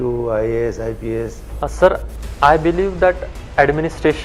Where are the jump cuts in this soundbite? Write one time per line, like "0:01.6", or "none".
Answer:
0:01.4